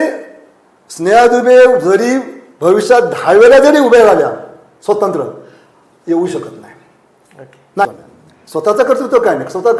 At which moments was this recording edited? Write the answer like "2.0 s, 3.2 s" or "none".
7.9 s

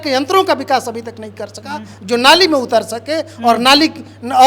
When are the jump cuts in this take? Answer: none

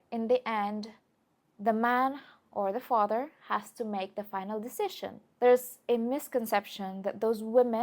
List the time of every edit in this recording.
5.2 s

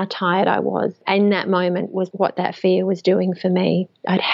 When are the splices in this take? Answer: 1.0 s, 2.1 s

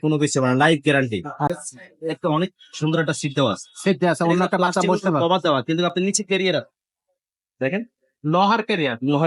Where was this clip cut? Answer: 1.5 s

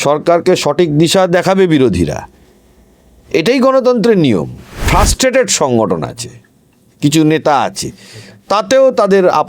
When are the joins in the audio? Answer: 4.8 s

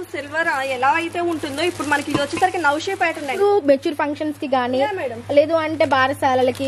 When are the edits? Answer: 3.4 s

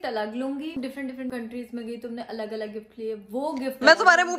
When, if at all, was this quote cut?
1.0 s

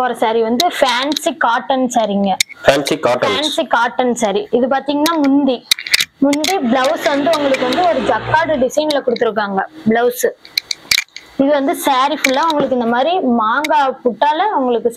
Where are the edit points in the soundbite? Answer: none

